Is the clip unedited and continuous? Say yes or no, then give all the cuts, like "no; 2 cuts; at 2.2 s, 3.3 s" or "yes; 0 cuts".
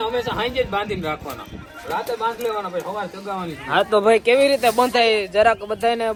yes; 0 cuts